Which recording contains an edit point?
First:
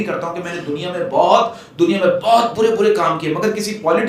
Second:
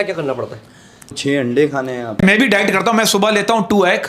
second; 2 cuts; at 1.1 s, 2.2 s

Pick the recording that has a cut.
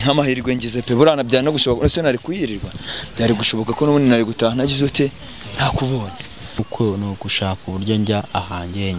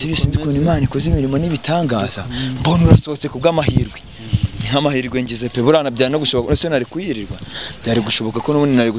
first; 1 cut; at 6.6 s

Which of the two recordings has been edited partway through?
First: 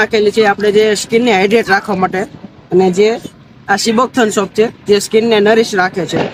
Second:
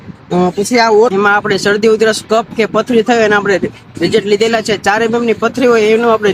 second; 1 cut; at 1.1 s

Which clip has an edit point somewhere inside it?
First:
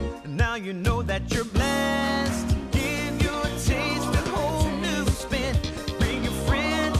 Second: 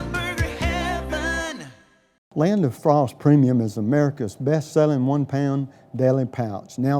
second; 1 cut; at 2.2 s

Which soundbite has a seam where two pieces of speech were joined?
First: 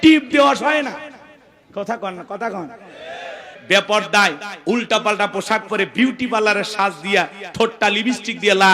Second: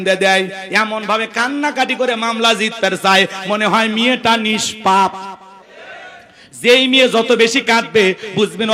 first; 1 cut; at 3.6 s

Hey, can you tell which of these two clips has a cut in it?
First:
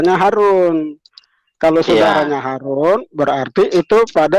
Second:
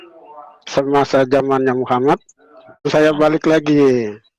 second; 1 cut; at 2.9 s

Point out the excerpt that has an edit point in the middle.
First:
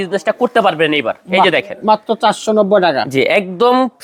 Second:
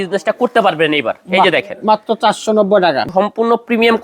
second; 1 cut; at 3.0 s

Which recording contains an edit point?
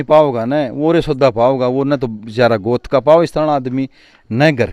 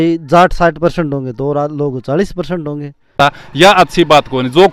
second; 1 cut; at 3.2 s

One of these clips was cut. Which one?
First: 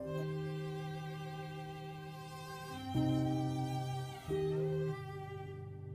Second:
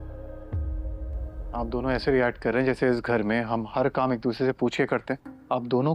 second; 1 cut; at 1.3 s

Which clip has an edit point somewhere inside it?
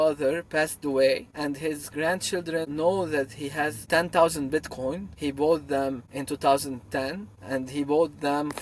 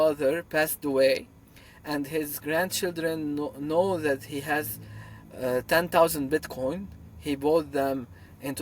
first; 6 cuts; at 1.3 s, 2.7 s, 3.9 s, 5.1 s, 6.1 s, 7.3 s

